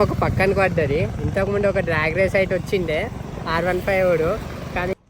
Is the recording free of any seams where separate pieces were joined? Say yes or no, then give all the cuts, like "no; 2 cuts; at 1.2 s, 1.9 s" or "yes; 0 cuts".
yes; 0 cuts